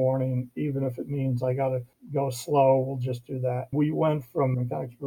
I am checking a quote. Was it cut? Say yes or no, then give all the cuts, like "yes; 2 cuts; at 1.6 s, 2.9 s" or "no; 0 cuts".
yes; 1 cut; at 3.7 s